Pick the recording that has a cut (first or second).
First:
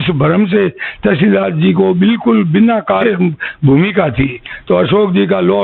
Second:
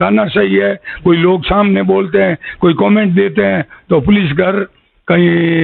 first